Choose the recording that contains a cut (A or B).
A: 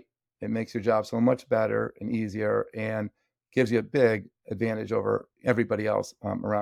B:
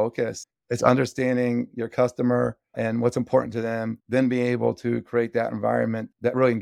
B